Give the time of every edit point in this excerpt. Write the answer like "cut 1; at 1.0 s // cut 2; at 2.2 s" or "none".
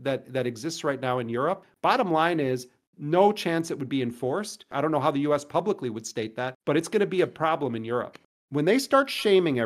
cut 1; at 1.7 s // cut 2; at 4.7 s // cut 3; at 8.2 s